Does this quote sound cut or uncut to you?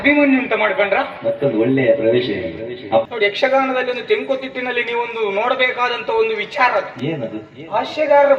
cut